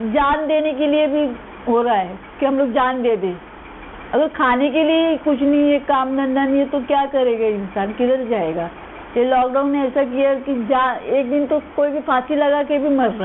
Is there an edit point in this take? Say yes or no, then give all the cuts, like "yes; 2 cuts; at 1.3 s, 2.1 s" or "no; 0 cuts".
no; 0 cuts